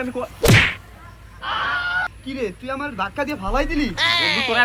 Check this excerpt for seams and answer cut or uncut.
uncut